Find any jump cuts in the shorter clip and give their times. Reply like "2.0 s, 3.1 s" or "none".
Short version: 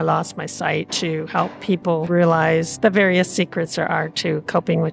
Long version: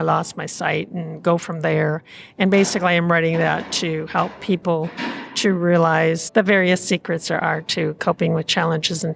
0.9 s, 2.1 s